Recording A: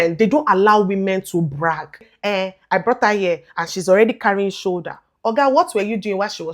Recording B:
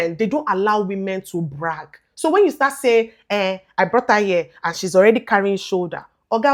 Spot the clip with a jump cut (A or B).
A